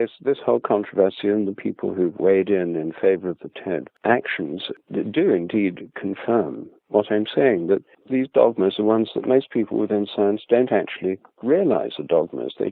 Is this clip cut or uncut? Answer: cut